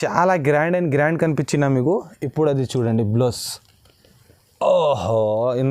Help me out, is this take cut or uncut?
uncut